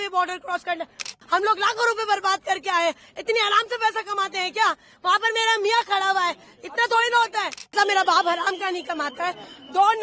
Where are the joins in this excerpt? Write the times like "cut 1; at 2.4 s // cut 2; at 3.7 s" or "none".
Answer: cut 1; at 1.1 s // cut 2; at 7.7 s